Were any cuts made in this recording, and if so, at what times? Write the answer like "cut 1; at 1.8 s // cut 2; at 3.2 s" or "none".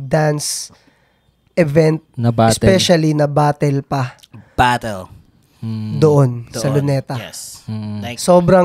none